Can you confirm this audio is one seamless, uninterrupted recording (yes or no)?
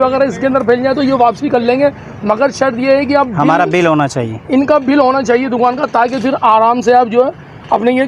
yes